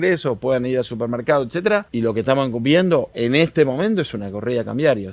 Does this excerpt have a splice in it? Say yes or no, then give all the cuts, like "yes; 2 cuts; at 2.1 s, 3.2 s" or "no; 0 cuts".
yes; 2 cuts; at 1.9 s, 3.1 s